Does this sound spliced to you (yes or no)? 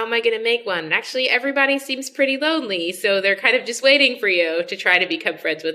no